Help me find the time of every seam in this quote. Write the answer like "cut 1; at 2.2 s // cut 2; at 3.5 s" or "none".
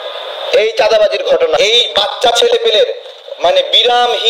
cut 1; at 1.6 s